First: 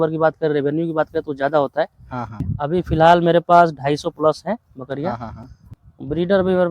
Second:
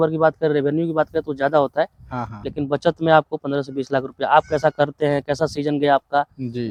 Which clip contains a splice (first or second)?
first